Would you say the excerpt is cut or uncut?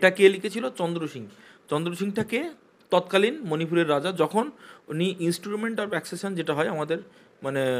uncut